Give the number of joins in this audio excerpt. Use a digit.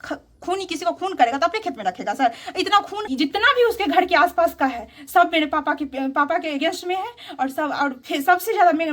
1